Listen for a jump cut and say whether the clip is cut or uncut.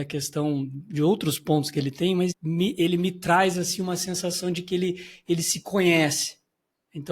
cut